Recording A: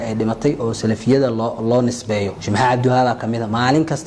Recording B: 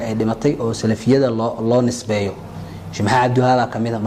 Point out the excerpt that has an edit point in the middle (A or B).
A